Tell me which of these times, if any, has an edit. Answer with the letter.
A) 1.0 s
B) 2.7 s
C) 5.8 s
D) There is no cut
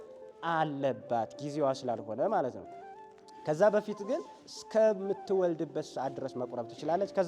D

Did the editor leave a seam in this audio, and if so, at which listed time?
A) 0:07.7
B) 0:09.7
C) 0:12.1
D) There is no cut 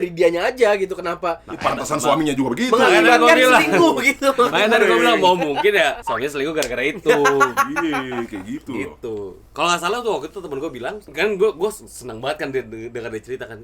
D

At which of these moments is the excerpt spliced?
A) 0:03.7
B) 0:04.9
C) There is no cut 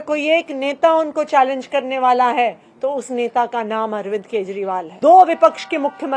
B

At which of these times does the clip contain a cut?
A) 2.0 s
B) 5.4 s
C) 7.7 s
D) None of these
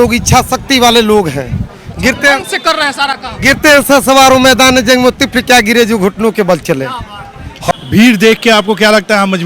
C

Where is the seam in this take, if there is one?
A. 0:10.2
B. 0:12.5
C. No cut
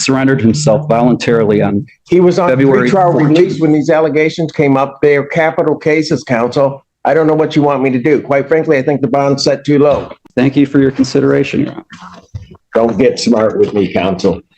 A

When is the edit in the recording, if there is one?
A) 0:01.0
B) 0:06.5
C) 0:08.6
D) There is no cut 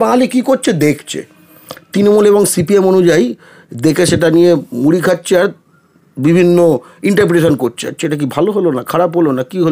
D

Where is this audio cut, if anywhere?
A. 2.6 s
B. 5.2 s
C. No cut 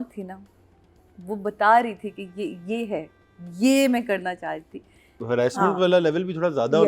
B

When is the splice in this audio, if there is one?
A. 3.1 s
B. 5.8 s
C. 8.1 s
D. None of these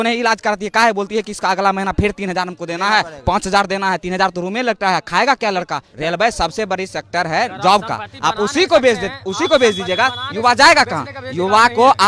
B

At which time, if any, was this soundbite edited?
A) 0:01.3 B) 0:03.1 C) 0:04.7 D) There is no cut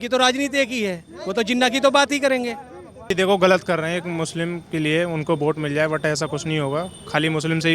B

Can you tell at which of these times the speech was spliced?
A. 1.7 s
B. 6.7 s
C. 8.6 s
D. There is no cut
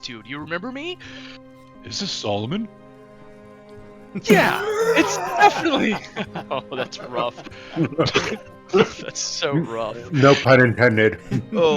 A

